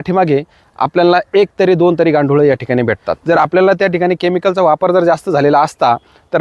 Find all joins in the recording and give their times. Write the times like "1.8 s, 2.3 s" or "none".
3.1 s